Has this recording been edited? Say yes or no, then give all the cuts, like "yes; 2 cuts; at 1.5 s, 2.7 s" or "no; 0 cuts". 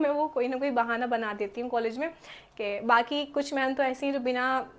no; 0 cuts